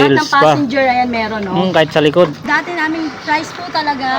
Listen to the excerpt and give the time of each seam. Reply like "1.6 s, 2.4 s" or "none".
2.4 s